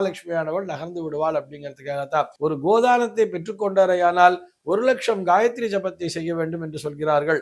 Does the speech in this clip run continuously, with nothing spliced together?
no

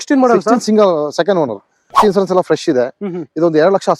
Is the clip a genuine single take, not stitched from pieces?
no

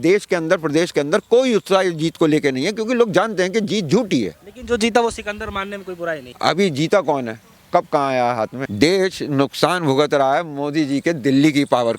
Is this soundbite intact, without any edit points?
no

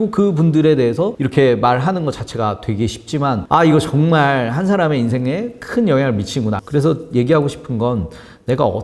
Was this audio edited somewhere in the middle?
yes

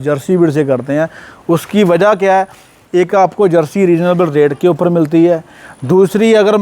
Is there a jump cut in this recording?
no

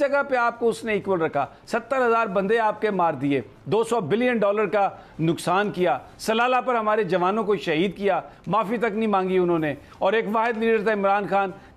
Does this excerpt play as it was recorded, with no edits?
yes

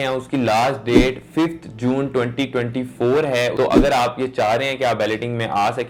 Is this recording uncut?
no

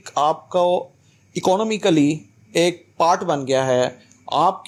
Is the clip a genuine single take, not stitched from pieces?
yes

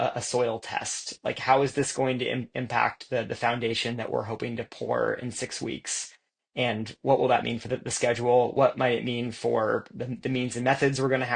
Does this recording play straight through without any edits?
yes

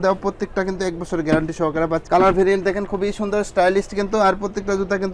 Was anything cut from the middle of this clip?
no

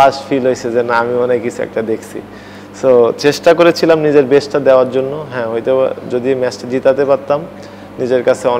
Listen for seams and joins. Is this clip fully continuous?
yes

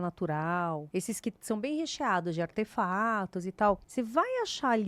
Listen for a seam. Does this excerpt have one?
yes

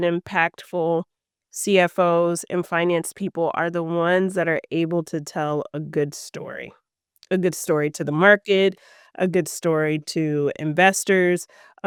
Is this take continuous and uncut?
yes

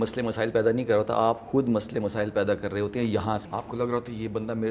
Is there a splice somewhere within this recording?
yes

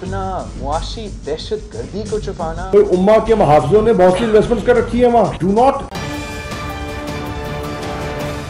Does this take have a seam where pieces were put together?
yes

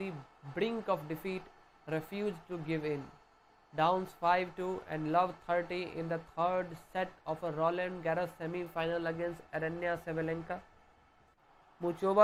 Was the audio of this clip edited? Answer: no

